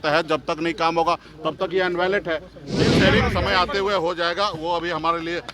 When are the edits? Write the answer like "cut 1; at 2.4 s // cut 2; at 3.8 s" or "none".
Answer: cut 1; at 2.9 s

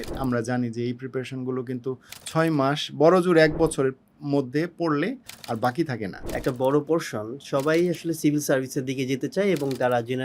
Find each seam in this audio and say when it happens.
cut 1; at 6.1 s

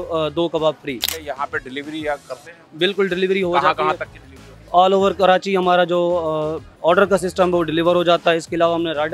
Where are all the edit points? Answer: none

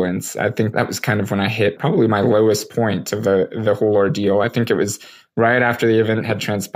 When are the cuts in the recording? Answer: cut 1; at 0.7 s // cut 2; at 1.8 s

